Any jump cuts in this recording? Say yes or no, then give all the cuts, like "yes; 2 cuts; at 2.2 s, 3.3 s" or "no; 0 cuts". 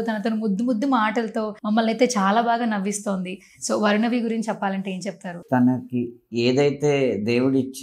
yes; 2 cuts; at 1.5 s, 5.4 s